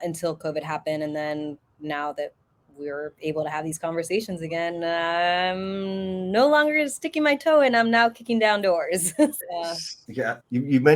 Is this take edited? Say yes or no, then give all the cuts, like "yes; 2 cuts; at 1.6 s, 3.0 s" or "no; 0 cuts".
no; 0 cuts